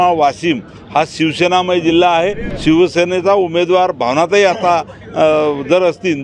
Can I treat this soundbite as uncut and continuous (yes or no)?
no